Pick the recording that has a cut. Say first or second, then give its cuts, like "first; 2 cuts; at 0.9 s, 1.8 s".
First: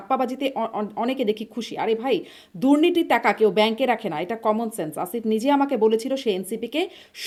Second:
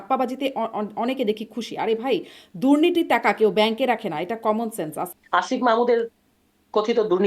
second; 1 cut; at 5.0 s